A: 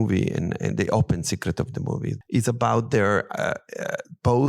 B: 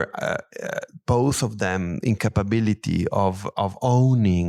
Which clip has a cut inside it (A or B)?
A